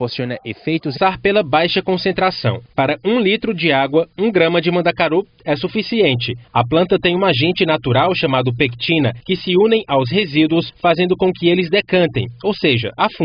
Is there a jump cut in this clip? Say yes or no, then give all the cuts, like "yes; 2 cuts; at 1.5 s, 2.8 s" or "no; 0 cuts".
no; 0 cuts